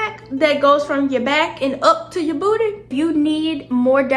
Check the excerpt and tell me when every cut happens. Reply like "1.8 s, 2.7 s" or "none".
2.9 s